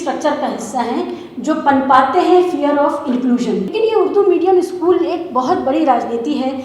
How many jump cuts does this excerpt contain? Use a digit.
1